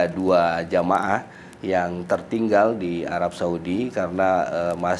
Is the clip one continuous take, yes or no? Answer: yes